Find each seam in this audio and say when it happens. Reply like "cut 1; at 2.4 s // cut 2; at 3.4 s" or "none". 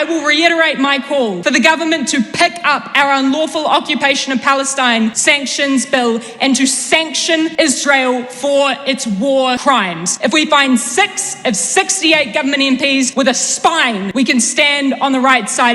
cut 1; at 1.4 s // cut 2; at 5.2 s // cut 3; at 7.5 s // cut 4; at 9.8 s // cut 5; at 13.1 s // cut 6; at 14.1 s